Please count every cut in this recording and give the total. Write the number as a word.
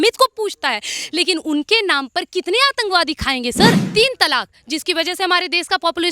one